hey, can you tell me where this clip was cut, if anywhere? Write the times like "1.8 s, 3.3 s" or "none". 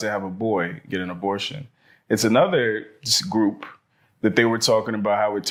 none